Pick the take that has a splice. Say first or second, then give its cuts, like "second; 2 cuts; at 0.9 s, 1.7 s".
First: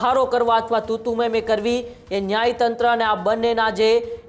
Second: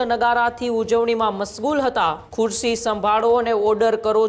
second; 1 cut; at 2.2 s